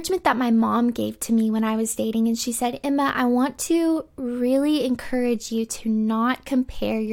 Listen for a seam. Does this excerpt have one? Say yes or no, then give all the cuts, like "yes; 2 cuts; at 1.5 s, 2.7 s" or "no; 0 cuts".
no; 0 cuts